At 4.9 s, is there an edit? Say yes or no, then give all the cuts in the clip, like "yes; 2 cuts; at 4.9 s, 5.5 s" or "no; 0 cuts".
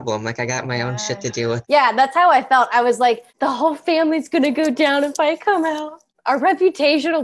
no; 2 cuts; at 1.6 s, 3.3 s